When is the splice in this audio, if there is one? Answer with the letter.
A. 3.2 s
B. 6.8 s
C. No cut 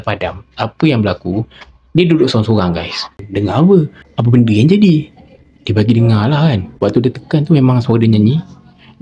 A